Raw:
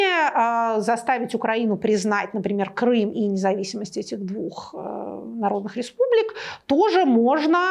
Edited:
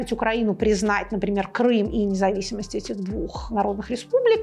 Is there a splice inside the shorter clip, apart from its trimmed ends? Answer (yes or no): yes